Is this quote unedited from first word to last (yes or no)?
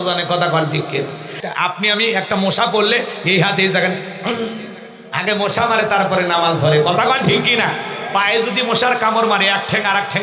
no